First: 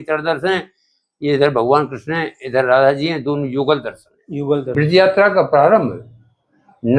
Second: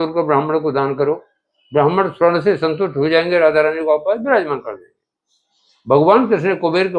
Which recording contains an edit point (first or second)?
first